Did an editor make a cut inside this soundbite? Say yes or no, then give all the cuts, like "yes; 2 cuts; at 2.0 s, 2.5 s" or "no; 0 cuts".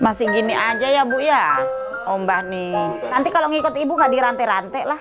yes; 1 cut; at 3.0 s